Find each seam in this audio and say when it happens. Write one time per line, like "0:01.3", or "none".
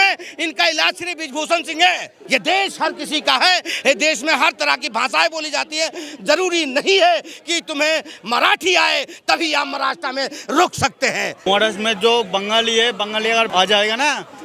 0:02.1
0:11.4
0:13.5